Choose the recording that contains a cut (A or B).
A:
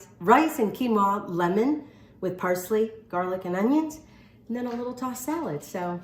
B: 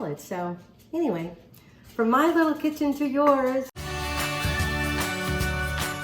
B